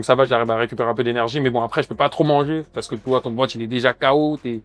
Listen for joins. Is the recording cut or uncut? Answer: uncut